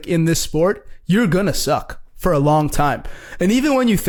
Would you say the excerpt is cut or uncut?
uncut